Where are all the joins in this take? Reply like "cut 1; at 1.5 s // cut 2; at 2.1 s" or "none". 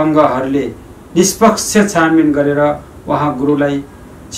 none